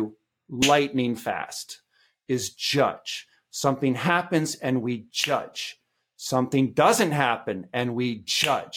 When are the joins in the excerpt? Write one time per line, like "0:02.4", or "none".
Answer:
none